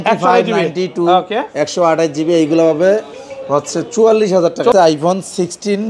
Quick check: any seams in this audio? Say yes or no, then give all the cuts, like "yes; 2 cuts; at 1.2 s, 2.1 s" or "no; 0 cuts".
yes; 1 cut; at 4.7 s